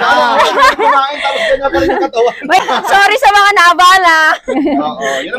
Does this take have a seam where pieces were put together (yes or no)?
yes